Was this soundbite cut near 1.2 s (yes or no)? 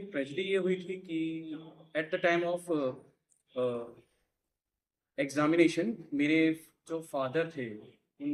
no